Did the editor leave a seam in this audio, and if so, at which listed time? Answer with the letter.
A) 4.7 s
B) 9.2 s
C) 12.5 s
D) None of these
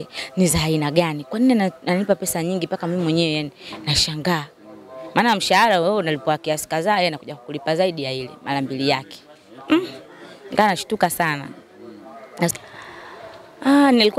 C